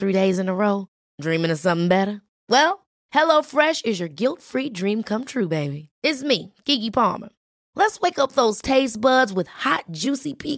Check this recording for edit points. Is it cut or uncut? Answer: uncut